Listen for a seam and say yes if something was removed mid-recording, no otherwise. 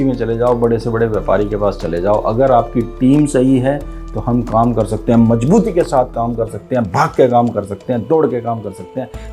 no